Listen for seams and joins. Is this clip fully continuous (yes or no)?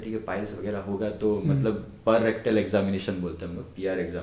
yes